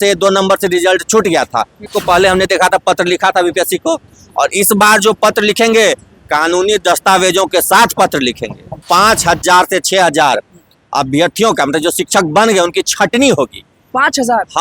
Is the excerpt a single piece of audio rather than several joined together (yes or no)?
no